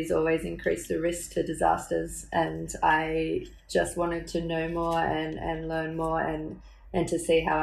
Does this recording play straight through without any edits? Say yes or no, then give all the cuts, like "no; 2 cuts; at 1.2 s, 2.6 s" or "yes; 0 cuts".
yes; 0 cuts